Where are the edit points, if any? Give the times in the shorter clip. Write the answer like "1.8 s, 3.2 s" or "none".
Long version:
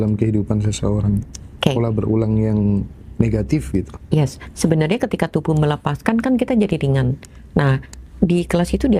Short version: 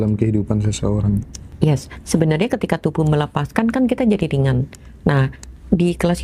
1.5 s